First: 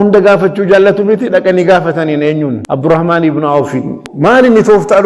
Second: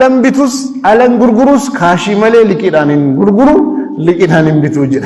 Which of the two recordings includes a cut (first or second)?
first